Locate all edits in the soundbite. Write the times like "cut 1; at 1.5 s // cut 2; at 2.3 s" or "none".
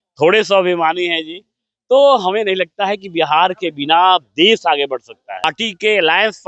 cut 1; at 5.4 s